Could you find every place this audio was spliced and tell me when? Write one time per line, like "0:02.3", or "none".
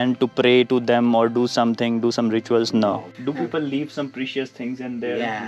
0:03.1